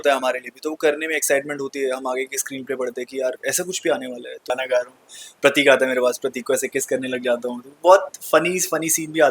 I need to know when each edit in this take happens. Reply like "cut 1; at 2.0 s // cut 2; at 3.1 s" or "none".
cut 1; at 4.5 s